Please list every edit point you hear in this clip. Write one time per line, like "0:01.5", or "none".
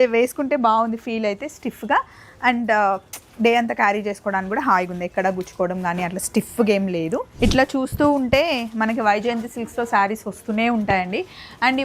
0:07.3